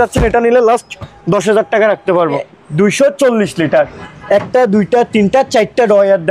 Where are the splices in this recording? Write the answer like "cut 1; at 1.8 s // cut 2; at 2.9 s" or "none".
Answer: cut 1; at 2.5 s // cut 2; at 4.1 s